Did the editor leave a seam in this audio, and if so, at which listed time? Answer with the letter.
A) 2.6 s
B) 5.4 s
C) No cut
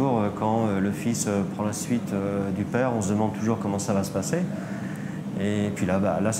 C